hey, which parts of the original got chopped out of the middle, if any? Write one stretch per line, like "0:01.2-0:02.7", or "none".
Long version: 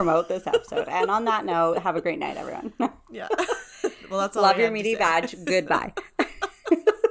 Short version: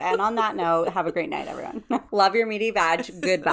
0:03.0-0:04.3